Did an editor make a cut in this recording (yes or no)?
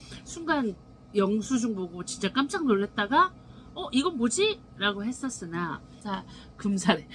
yes